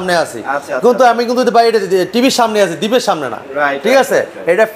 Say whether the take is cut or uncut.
uncut